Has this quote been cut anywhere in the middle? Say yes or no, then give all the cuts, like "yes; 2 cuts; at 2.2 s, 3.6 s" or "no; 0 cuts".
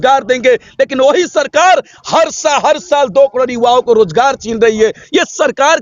no; 0 cuts